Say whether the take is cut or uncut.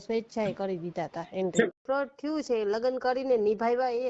cut